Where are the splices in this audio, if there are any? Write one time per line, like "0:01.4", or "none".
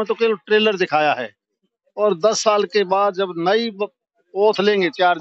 none